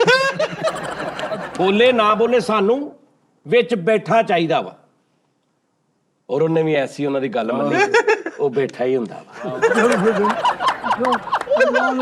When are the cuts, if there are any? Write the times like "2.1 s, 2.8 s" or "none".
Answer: 1.4 s